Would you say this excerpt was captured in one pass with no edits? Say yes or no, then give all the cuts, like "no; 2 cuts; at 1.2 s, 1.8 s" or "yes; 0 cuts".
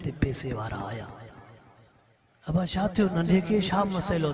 yes; 0 cuts